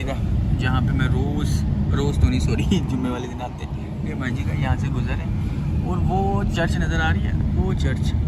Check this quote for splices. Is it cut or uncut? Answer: uncut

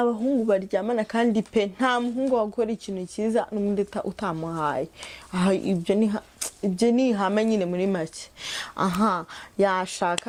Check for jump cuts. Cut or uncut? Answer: uncut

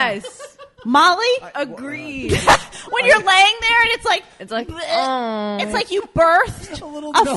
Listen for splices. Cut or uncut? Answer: cut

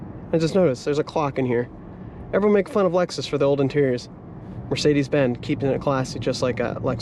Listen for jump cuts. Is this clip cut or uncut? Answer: uncut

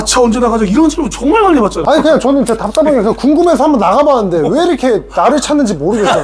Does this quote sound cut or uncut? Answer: cut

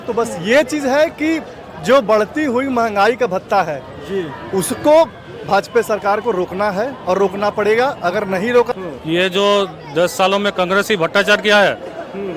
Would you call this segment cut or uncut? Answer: cut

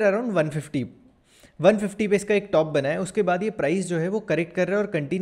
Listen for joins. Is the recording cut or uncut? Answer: uncut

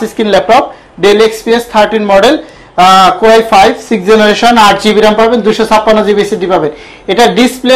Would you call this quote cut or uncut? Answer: uncut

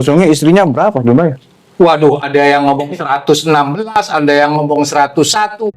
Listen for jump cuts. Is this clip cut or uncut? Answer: uncut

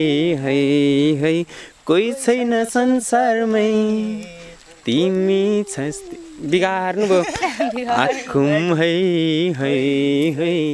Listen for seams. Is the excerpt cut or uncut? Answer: uncut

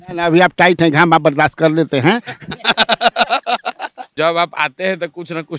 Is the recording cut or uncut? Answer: cut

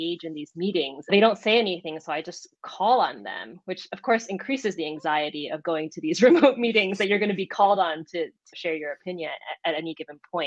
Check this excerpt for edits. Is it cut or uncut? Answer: cut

